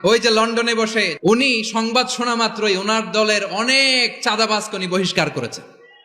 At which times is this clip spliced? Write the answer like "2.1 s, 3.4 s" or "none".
1.1 s